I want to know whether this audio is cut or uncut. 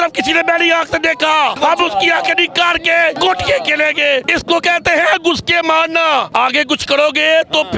cut